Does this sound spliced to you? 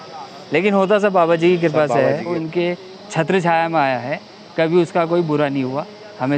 yes; 1 cut; at 2.4 s

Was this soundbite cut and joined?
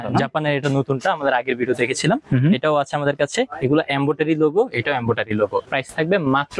yes; 1 cut; at 5.7 s

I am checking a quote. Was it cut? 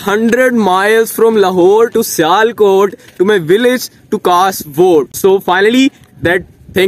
no; 0 cuts

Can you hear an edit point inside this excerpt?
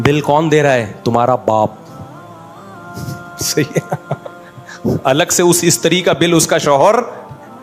no; 0 cuts

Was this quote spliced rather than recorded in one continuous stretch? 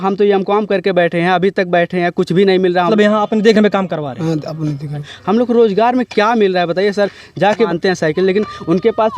yes; 3 cuts; at 2.9 s, 5.1 s, 7.7 s

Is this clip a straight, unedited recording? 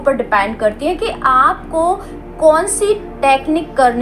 yes; 0 cuts

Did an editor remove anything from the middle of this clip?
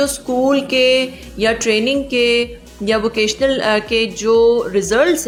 no; 0 cuts

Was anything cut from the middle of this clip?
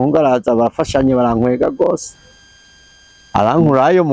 no; 0 cuts

